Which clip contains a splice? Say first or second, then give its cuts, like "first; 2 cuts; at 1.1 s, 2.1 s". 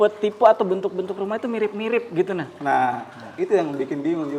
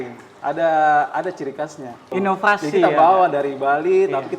second; 1 cut; at 2.0 s